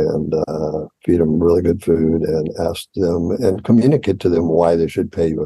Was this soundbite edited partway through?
no; 0 cuts

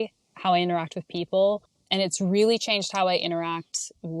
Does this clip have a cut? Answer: yes; 1 cut; at 1.8 s

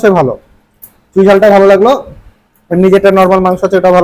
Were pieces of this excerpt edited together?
no; 0 cuts

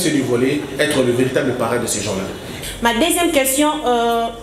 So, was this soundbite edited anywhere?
yes; 1 cut; at 2.4 s

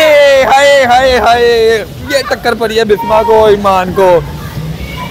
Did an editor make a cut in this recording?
no; 0 cuts

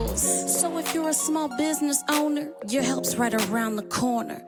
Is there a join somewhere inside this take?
no; 0 cuts

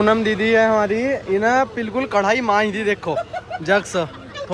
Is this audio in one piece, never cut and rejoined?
yes; 0 cuts

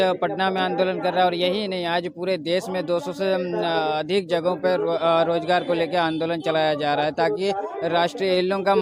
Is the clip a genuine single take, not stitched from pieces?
yes; 0 cuts

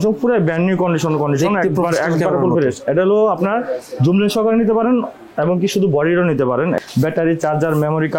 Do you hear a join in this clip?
yes; 1 cut; at 6.8 s

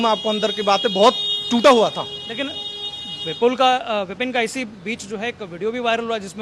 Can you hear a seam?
no; 0 cuts

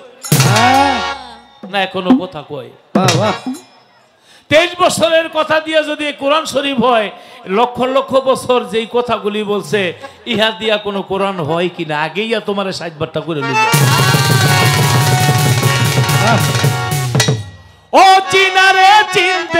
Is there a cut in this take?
no; 0 cuts

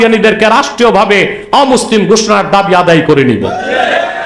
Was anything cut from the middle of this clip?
no; 0 cuts

